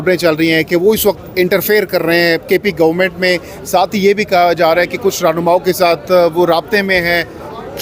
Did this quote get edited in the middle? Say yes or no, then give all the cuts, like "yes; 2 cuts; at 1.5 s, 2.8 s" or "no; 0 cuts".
no; 0 cuts